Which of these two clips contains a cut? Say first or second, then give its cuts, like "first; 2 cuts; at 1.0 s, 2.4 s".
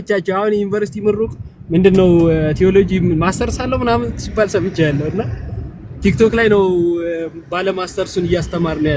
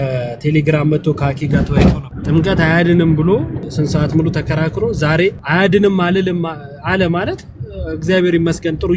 second; 3 cuts; at 2.1 s, 3.6 s, 5.4 s